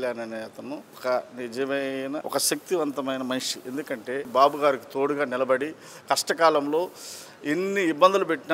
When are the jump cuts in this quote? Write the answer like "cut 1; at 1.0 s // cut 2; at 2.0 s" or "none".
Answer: cut 1; at 0.9 s // cut 2; at 2.2 s // cut 3; at 4.3 s